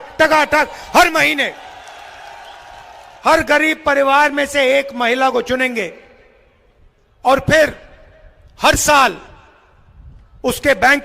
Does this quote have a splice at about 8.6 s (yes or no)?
no